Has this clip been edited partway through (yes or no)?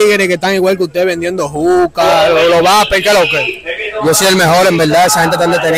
no